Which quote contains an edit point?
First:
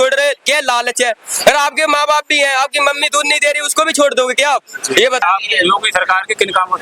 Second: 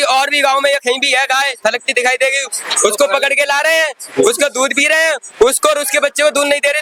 first; 1 cut; at 5.2 s

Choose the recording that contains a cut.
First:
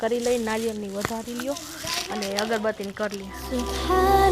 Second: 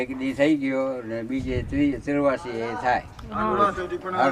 first; 1 cut; at 3.3 s

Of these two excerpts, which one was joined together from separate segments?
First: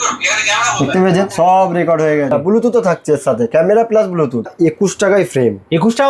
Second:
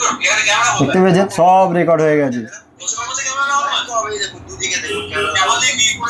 first; 2 cuts; at 2.3 s, 4.5 s

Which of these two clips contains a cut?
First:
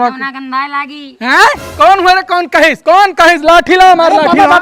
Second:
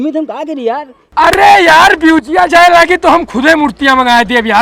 second; 1 cut; at 1.0 s

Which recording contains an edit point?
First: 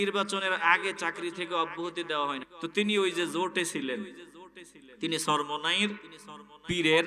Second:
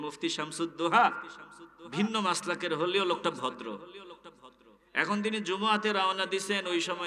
first; 1 cut; at 2.5 s

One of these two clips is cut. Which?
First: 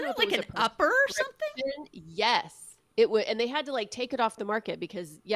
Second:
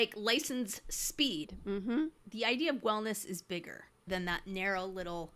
second; 2 cuts; at 1.9 s, 4.1 s

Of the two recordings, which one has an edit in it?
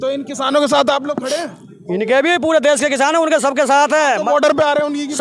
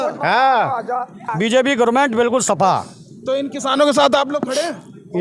second; 1 cut; at 1.3 s

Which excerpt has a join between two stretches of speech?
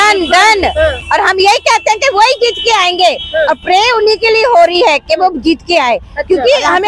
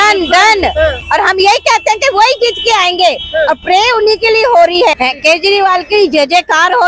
second; 1 cut; at 5.0 s

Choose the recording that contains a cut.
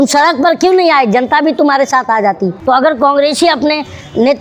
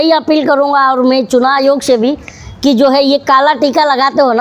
first; 1 cut; at 2.6 s

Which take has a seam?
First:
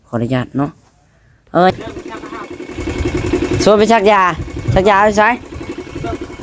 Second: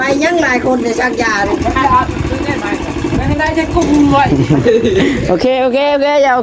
first; 1 cut; at 1.7 s

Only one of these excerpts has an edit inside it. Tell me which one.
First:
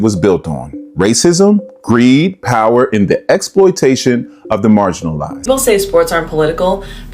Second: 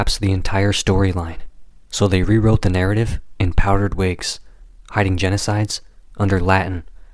first; 1 cut; at 5.3 s

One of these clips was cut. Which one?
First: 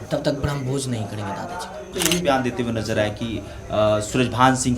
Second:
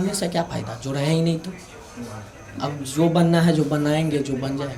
first; 1 cut; at 1.9 s

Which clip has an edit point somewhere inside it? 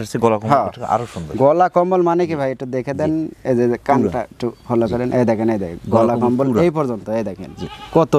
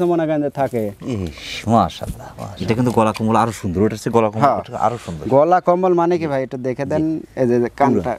second; 1 cut; at 2.5 s

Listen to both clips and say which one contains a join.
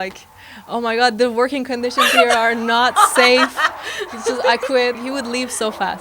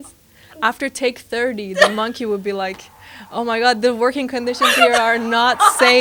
first; 1 cut; at 5.0 s

